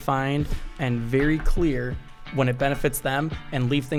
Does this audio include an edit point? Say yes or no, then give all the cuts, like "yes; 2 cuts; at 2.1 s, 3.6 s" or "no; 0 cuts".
no; 0 cuts